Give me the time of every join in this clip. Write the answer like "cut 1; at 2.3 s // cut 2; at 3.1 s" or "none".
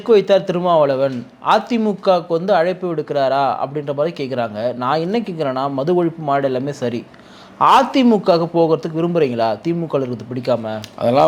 none

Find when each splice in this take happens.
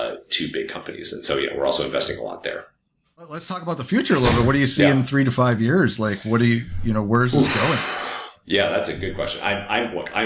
cut 1; at 3.5 s

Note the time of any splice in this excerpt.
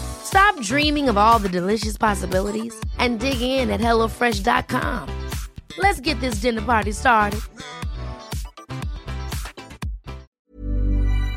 cut 1; at 10.3 s

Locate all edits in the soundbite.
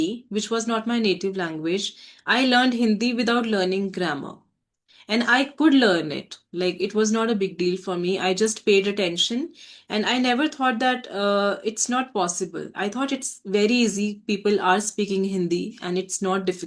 none

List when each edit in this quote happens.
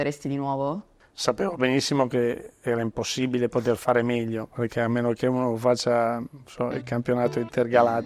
cut 1; at 0.9 s

